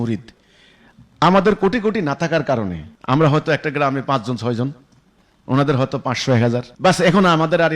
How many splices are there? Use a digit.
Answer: 2